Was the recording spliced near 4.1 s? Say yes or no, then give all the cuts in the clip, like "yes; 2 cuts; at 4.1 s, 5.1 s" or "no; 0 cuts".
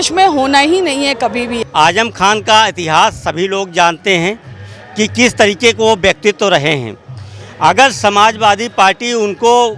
no; 1 cut; at 1.6 s